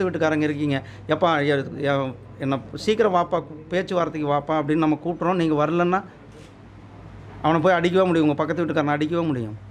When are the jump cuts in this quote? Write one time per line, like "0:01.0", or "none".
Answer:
none

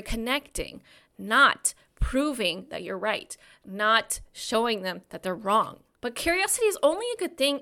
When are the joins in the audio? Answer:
0:05.8

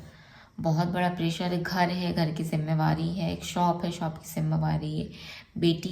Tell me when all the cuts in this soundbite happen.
none

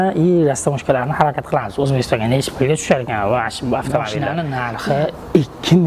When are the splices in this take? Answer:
0:04.2

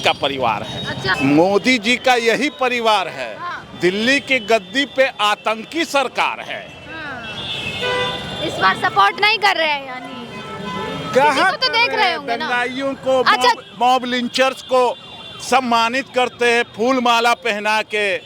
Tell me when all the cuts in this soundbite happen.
none

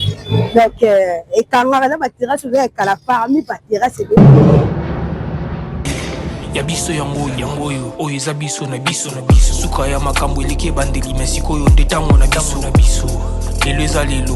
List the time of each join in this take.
0:04.2

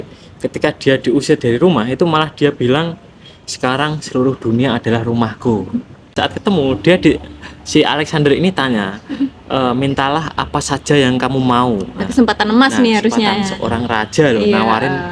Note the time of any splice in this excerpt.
0:06.1

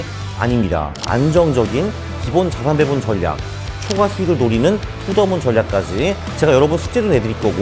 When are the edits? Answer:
0:01.0
0:06.3

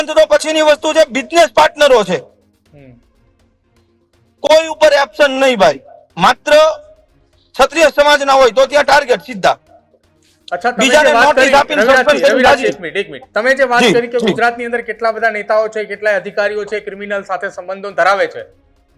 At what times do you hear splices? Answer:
none

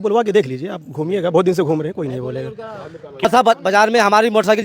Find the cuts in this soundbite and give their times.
0:03.2

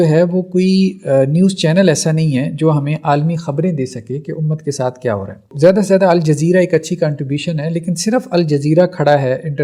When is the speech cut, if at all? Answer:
0:05.5

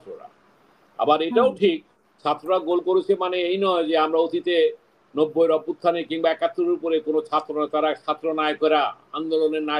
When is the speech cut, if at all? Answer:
none

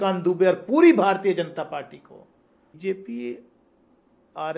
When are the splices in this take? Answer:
0:02.8

